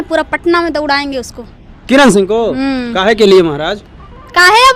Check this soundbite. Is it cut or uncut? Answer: uncut